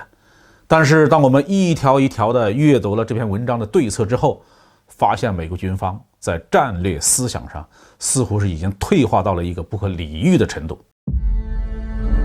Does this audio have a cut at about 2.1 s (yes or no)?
no